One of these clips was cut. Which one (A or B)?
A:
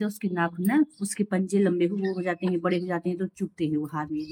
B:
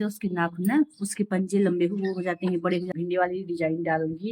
B